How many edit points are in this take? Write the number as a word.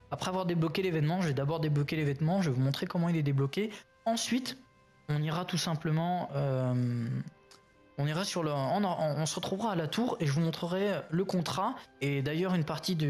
zero